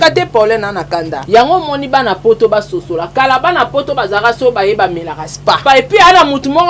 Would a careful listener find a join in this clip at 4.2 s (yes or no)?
no